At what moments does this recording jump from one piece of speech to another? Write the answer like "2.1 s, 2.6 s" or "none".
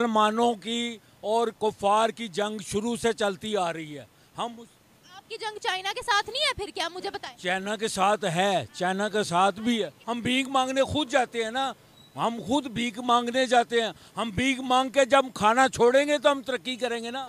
10.0 s